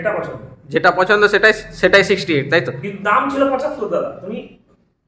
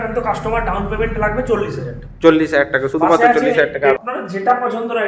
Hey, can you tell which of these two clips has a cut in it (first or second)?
second